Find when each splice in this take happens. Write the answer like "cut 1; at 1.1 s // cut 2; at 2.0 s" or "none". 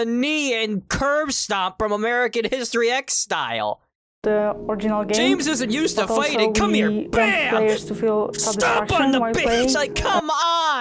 cut 1; at 9.9 s